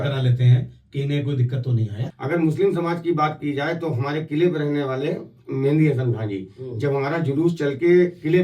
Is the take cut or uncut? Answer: cut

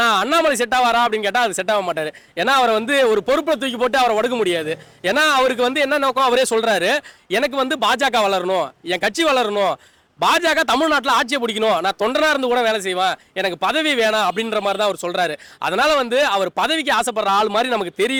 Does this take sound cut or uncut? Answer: uncut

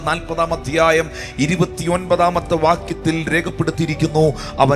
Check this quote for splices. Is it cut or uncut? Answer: uncut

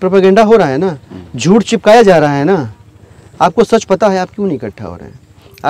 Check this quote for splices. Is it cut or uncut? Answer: uncut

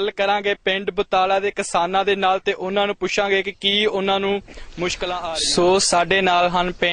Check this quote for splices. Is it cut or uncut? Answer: cut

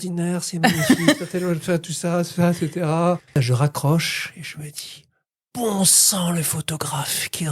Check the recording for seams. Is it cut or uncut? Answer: cut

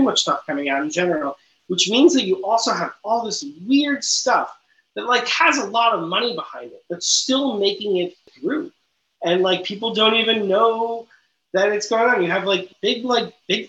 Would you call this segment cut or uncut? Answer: cut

